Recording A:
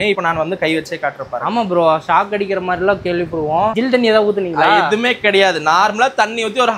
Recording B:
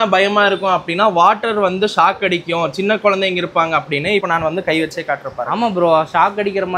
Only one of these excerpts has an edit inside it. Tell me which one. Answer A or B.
A